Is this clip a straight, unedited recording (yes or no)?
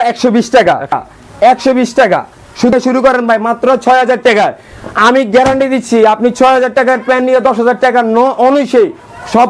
no